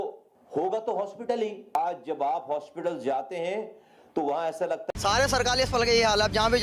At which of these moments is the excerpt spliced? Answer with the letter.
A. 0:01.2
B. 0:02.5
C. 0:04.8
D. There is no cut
C